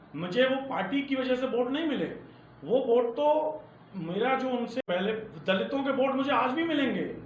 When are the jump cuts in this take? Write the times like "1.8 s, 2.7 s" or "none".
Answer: 4.8 s